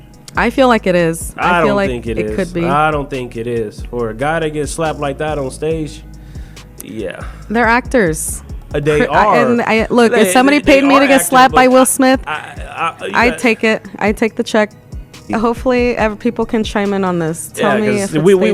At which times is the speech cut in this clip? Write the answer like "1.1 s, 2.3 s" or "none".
15.3 s